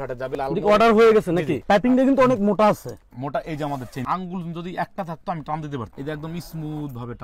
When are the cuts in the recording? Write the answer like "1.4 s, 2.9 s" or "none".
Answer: 1.6 s, 4.0 s, 5.9 s